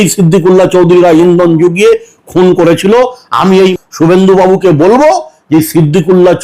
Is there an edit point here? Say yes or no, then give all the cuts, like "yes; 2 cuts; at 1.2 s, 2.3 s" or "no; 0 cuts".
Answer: yes; 1 cut; at 3.8 s